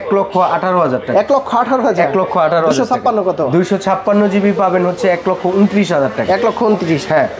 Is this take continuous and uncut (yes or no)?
yes